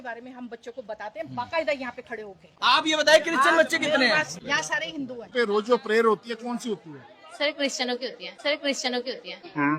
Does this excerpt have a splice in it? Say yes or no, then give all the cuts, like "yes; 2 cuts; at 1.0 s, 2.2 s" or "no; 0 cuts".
yes; 3 cuts; at 1.3 s, 2.5 s, 5.3 s